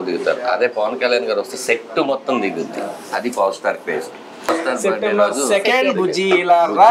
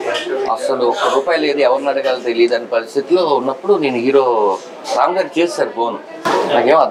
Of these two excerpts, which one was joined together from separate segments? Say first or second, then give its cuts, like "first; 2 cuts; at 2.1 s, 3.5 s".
first; 1 cut; at 4.5 s